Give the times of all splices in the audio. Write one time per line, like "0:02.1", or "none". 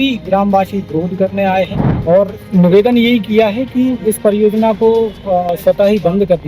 0:01.9

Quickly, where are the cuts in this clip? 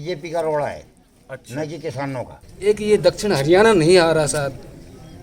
0:02.4

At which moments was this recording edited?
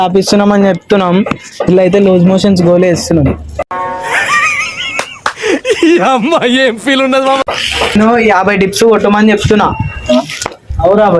0:07.9

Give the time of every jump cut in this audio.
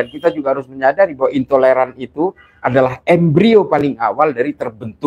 none

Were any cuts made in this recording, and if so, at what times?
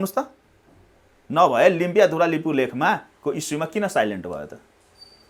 none

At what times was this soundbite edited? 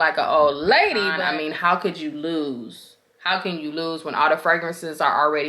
0:01.2

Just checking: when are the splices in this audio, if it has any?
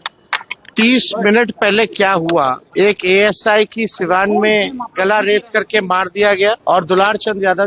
0:02.6
0:06.6

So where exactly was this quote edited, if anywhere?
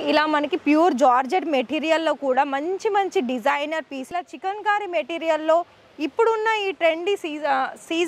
0:04.1

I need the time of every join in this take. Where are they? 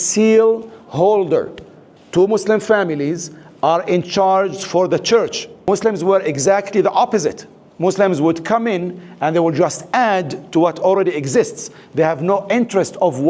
0:05.5

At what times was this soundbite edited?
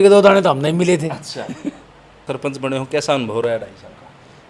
0:02.2

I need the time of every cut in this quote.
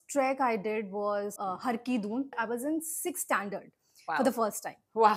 0:01.3
0:02.3

